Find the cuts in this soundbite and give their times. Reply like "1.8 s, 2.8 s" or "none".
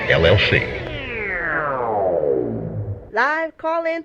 3.0 s